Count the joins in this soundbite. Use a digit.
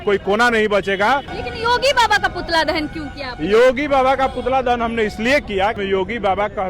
2